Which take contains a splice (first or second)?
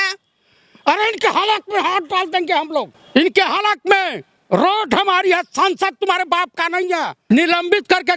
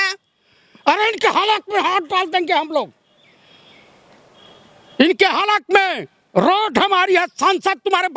first